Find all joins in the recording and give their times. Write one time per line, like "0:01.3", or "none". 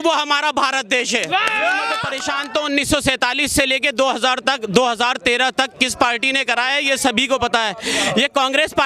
0:02.1

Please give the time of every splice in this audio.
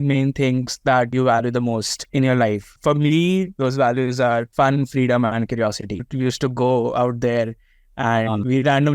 0:02.7
0:06.1

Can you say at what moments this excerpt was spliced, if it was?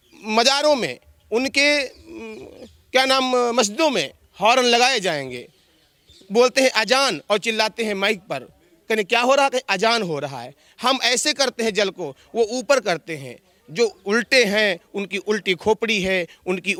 none

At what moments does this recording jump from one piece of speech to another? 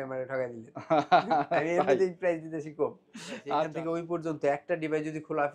0:03.7

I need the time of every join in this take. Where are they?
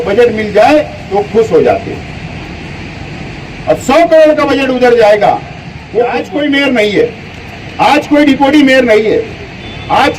0:06.2

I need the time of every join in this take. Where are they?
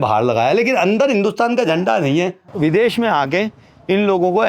0:02.4

